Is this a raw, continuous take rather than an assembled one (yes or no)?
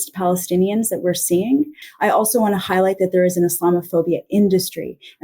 no